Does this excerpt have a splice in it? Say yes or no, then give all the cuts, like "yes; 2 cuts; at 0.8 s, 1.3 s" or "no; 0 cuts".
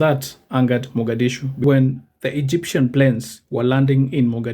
yes; 1 cut; at 1.6 s